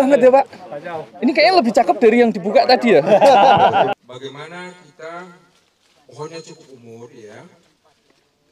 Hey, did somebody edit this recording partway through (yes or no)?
yes